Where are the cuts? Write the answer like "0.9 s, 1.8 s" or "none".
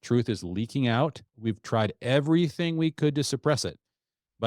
1.2 s